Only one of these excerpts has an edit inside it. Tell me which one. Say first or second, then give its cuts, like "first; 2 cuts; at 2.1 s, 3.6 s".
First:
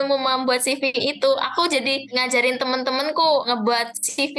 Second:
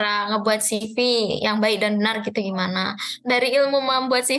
first; 1 cut; at 3.4 s